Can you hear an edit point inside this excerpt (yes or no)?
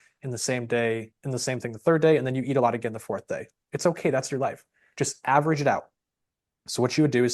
no